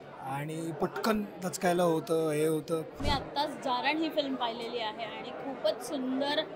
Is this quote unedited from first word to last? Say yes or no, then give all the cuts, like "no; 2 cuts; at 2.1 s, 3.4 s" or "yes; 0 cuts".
no; 1 cut; at 3.0 s